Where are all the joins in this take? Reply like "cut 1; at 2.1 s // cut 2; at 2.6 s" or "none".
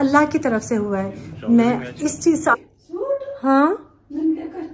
cut 1; at 2.6 s